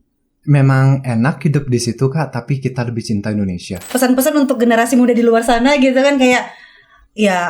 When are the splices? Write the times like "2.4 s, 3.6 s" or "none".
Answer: 3.7 s